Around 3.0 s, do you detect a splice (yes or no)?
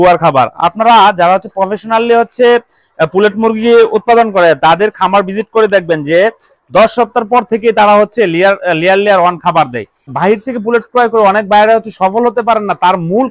no